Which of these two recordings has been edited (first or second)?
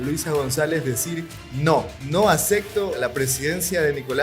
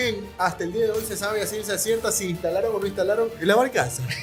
first